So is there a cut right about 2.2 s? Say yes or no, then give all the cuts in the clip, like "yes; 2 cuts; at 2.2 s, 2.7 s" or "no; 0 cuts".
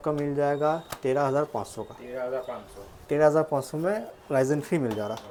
no; 0 cuts